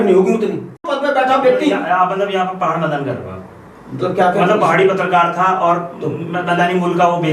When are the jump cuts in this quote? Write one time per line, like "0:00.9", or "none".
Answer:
0:00.9